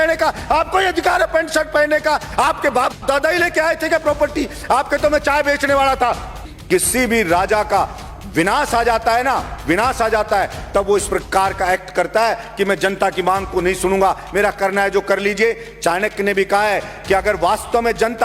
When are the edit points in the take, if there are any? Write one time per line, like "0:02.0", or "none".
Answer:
0:06.5